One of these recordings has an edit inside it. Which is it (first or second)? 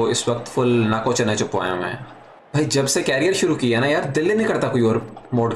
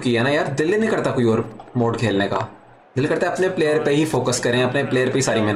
first